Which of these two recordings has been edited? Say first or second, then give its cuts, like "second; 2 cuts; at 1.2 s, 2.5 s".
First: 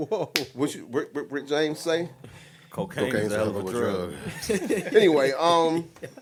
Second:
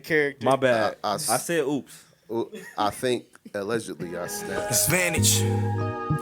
second; 1 cut; at 4.5 s